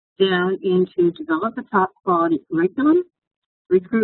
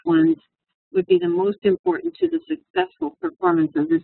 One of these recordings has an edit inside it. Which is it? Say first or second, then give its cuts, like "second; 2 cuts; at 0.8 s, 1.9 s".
second; 1 cut; at 1.5 s